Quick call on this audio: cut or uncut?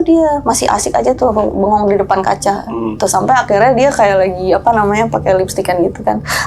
uncut